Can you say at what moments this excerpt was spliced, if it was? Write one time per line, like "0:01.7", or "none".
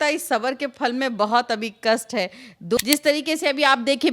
0:02.8